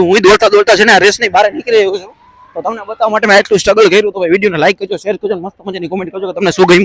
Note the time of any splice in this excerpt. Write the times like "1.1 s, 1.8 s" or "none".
none

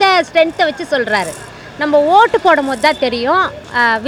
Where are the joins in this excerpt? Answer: none

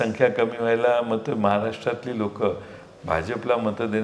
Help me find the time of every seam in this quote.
none

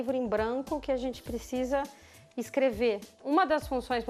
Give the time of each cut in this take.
3.1 s

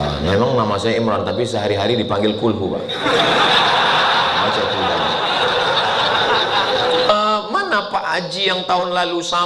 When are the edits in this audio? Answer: 7.1 s

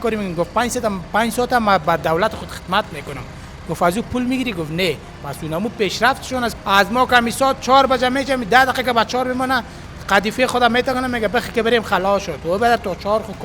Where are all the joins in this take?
6.5 s

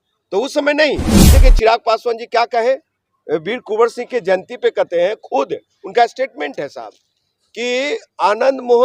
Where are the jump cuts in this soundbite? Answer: 1.2 s

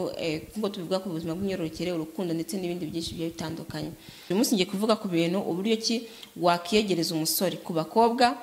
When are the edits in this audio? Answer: 4.2 s

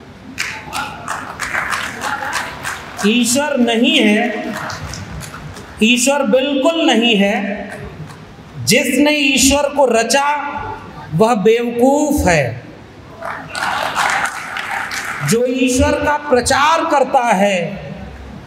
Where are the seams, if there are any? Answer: none

